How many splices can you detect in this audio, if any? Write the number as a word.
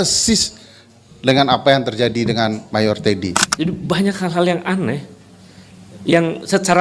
one